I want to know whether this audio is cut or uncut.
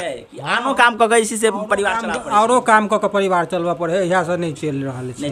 uncut